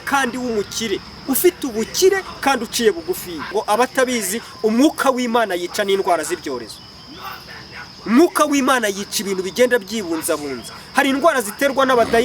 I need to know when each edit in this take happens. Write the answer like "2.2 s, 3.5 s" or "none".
3.5 s